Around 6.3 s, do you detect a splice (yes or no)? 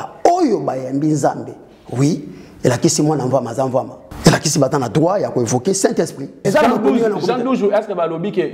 yes